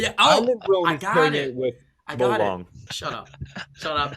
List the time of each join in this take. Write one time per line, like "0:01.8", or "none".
0:02.9